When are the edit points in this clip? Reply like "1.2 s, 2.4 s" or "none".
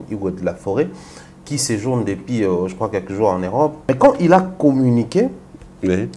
3.8 s